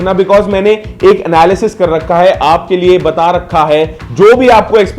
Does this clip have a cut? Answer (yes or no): yes